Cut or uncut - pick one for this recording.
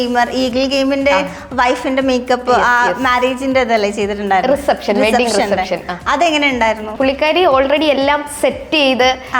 cut